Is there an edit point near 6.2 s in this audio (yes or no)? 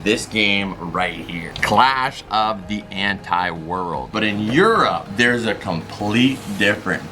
no